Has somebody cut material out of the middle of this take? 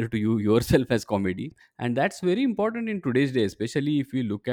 yes; 1 cut; at 1.5 s

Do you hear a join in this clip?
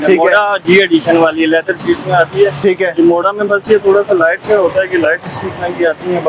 no; 0 cuts

